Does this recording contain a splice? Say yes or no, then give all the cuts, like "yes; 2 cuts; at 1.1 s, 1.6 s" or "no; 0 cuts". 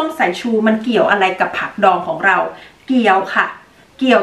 no; 0 cuts